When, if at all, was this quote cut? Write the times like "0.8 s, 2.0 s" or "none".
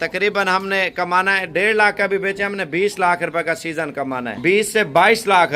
4.3 s